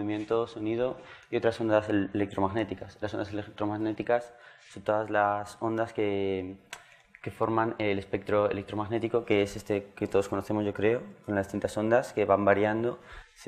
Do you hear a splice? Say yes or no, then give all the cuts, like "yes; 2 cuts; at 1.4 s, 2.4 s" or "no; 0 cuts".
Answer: yes; 1 cut; at 10.9 s